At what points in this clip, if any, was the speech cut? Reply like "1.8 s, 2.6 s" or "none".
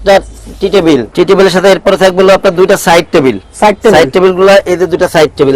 none